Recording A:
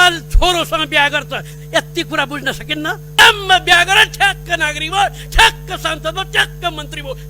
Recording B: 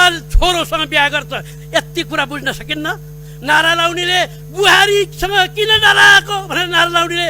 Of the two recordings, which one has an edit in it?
A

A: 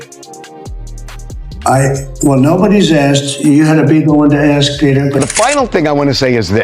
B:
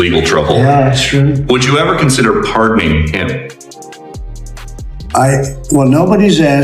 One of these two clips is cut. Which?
A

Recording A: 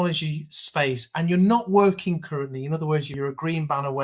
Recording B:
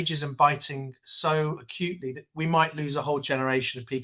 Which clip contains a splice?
A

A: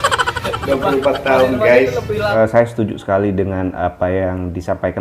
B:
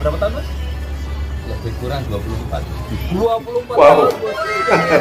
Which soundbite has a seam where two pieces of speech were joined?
A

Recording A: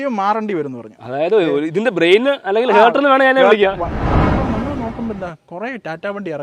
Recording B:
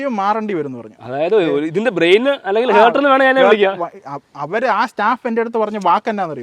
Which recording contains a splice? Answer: A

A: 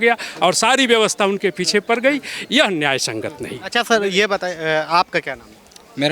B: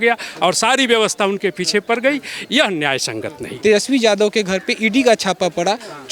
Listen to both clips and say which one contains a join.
B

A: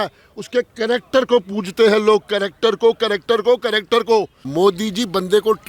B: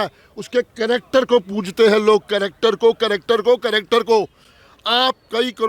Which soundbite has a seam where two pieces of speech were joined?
A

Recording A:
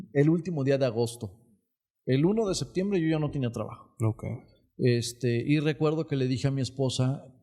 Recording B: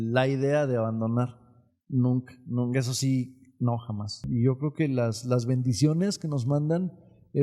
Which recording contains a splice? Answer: B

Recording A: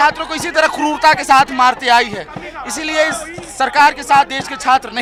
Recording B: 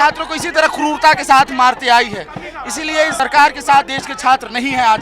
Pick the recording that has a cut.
B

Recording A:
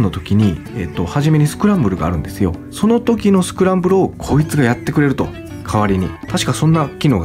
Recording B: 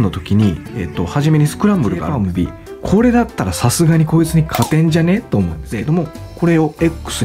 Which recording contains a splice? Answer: B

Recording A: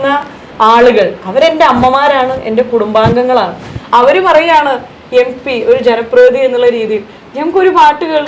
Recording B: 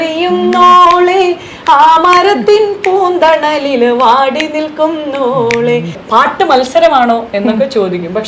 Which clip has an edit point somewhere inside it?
B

